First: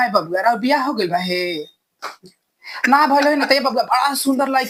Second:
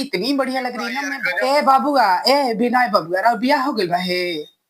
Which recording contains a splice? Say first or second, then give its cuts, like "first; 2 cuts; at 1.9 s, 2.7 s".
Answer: second; 1 cut; at 1.0 s